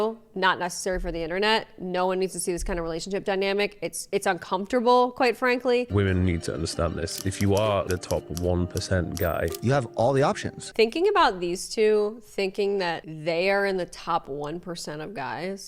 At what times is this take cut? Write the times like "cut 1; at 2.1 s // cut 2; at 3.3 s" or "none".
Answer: cut 1; at 5.9 s // cut 2; at 10.7 s